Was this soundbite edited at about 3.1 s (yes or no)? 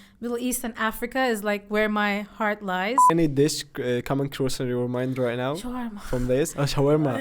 yes